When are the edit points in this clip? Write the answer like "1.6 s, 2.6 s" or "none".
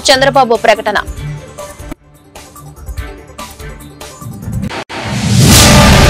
1.0 s, 4.7 s